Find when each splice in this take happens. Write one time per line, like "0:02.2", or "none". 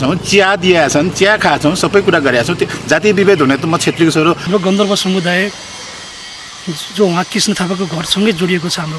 0:04.4